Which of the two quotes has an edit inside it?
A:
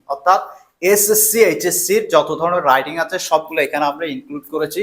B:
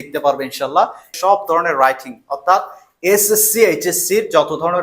B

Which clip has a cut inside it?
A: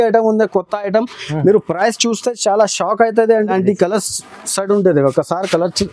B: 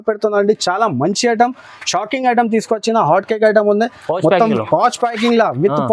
A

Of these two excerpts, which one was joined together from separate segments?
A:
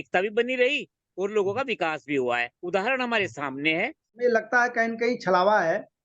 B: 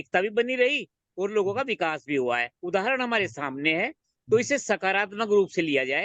A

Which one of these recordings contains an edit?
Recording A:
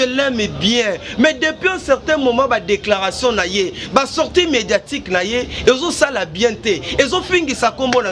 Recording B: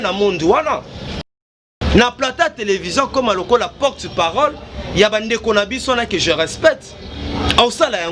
B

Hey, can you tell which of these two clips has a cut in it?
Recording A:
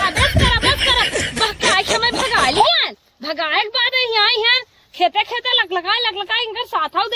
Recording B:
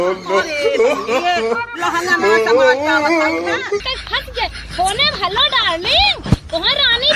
B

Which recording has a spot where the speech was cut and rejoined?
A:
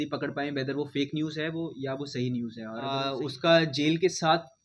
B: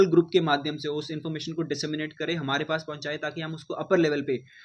A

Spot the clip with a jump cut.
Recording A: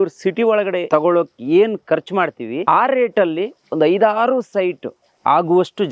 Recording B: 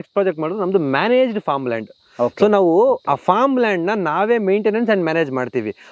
A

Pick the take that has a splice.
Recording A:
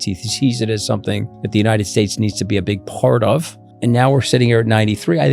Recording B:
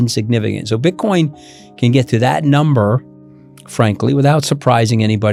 A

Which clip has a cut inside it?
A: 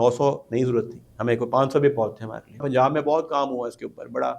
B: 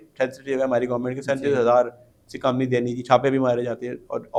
A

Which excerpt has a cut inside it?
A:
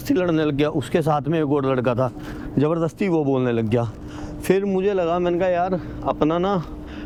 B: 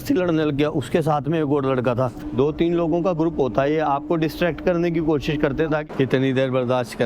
B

